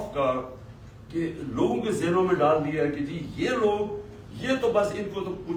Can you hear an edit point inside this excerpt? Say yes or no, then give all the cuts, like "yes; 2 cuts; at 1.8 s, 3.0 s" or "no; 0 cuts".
no; 0 cuts